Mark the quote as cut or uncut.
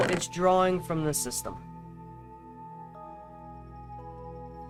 uncut